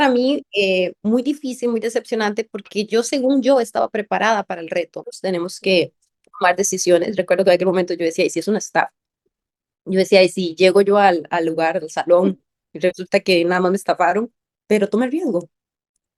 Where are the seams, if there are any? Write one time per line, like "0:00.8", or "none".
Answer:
0:05.1